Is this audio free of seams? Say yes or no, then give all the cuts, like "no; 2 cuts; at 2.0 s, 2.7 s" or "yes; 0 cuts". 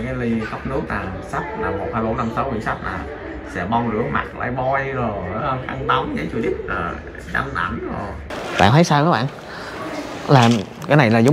yes; 0 cuts